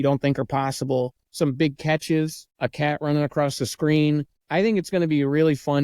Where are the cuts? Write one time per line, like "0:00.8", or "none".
0:01.2
0:02.4
0:04.4